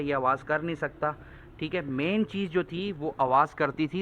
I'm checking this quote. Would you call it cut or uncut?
uncut